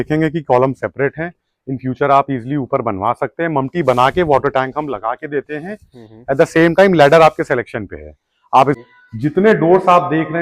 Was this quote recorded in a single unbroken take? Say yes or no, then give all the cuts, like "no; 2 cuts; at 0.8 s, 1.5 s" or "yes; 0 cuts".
no; 1 cut; at 8.8 s